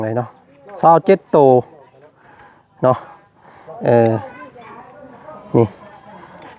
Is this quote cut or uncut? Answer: uncut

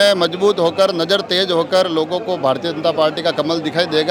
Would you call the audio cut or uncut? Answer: uncut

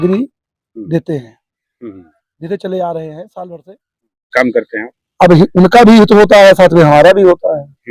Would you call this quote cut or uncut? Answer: cut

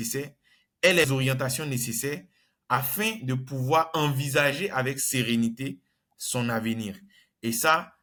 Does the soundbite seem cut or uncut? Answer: uncut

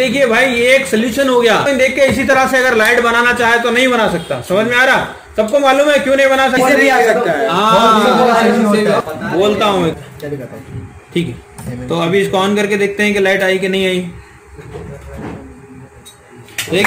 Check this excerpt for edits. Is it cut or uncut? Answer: cut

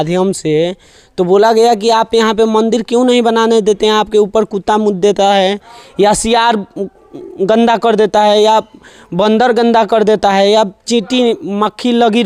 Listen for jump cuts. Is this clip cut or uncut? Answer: uncut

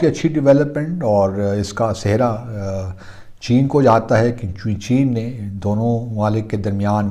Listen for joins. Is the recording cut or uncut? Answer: uncut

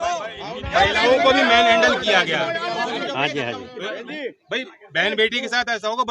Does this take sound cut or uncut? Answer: uncut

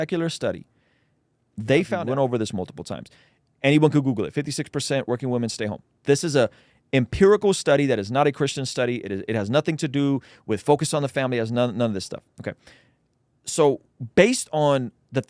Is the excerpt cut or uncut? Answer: cut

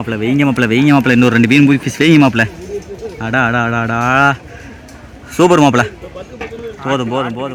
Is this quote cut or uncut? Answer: uncut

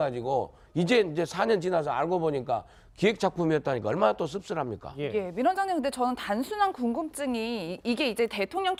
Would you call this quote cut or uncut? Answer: uncut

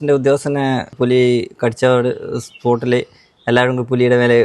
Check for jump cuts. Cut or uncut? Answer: cut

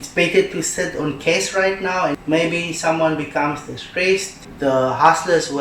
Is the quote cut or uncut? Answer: cut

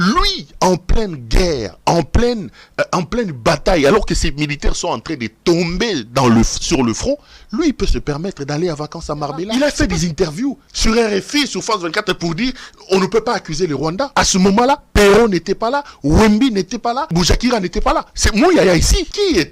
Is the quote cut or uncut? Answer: cut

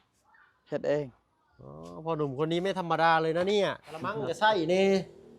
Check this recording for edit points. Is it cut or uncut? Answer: cut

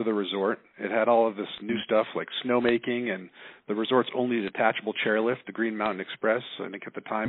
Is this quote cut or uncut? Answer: uncut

